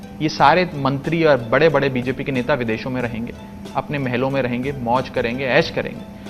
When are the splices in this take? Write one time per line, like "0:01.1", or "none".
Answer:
none